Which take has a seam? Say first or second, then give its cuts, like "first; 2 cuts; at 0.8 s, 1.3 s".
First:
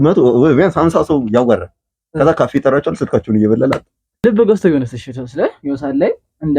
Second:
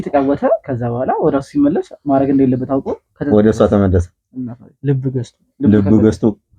first; 1 cut; at 4.2 s